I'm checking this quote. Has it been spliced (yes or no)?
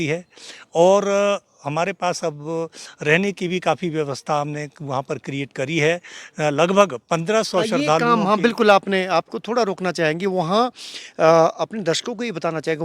no